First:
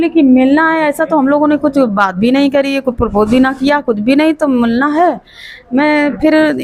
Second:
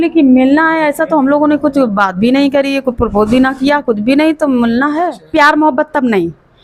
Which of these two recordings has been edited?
second; 1 cut; at 5.2 s

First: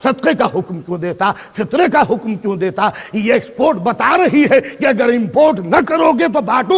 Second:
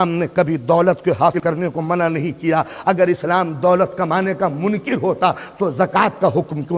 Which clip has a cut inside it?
second; 1 cut; at 1.4 s

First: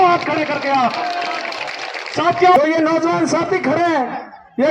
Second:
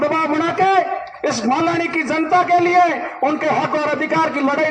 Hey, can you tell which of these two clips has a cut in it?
first; 1 cut; at 2.6 s

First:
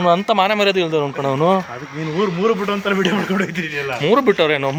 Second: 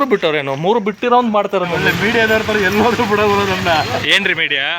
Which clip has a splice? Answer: second; 1 cut; at 1.8 s

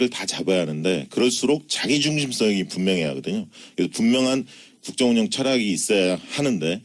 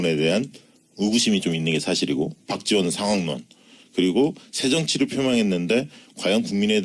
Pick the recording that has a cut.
second; 1 cut; at 4.4 s

